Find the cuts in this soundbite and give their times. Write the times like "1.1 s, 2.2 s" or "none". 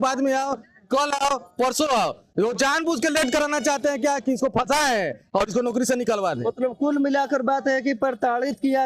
none